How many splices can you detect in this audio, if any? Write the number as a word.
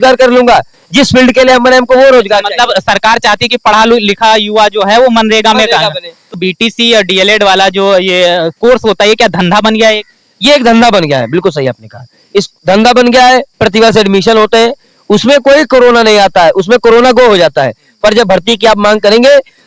one